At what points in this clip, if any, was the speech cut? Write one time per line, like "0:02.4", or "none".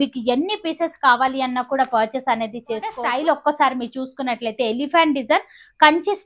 0:03.1